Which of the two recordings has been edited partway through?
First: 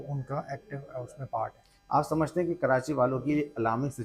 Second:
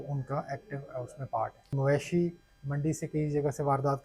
second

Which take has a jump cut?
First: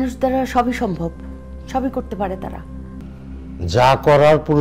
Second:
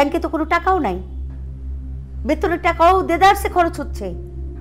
first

